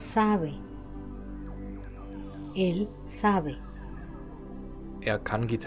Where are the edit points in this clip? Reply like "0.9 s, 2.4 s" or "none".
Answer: 0.9 s, 2.5 s